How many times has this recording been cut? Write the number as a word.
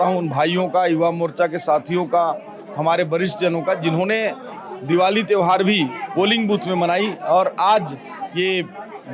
zero